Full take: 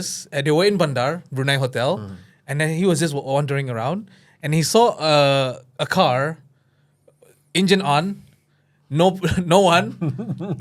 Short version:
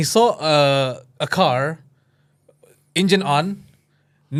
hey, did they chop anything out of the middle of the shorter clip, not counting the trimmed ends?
no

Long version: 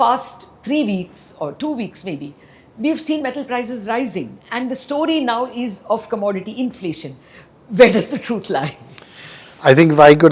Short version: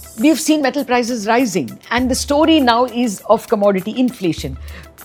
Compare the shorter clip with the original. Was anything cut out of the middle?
no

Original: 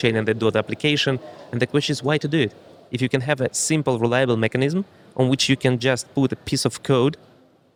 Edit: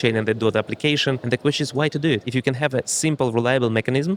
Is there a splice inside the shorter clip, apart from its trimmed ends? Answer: yes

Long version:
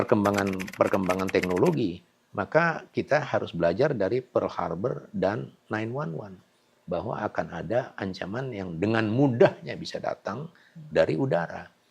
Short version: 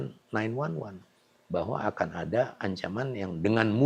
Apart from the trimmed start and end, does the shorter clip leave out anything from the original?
no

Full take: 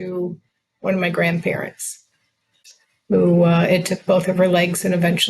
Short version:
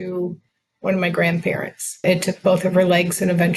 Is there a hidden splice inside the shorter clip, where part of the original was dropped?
yes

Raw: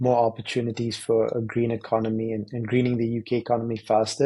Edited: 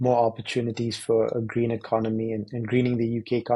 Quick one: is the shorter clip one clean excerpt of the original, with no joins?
yes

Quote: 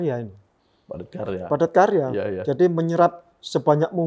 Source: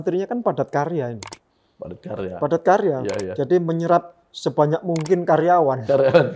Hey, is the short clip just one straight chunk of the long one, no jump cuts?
yes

